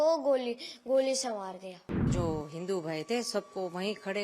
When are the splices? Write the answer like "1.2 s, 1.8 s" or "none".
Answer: 2.1 s

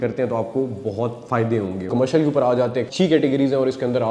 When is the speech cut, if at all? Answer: 1.9 s, 2.9 s

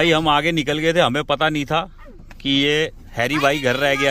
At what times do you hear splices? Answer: none

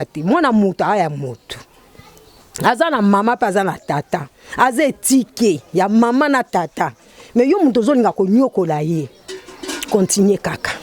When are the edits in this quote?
none

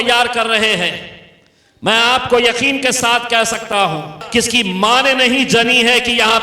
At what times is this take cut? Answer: 4.2 s

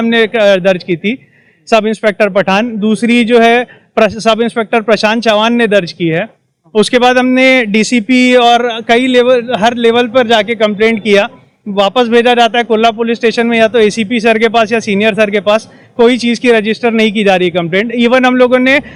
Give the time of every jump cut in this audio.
none

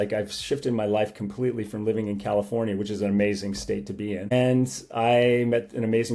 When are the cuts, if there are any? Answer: 4.3 s

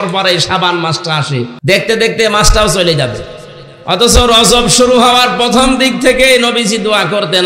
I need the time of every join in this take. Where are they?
1.5 s

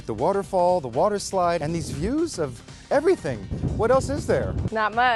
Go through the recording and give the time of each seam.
1.6 s, 3.5 s

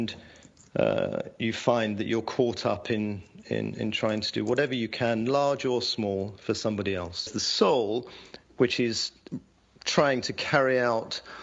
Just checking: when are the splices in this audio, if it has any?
7.4 s

